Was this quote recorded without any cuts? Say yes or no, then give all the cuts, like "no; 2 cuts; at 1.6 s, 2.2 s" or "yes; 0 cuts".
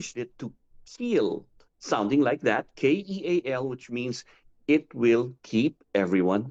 yes; 0 cuts